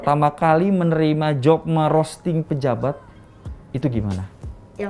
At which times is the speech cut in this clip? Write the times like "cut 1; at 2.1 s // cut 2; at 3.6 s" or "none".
none